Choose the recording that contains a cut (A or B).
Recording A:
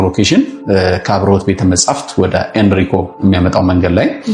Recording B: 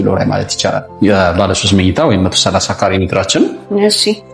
B